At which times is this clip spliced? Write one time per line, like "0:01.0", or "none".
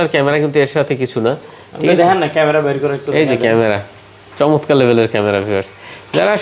none